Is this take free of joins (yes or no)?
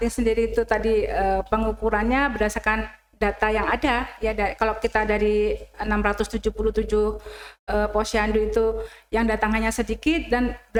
yes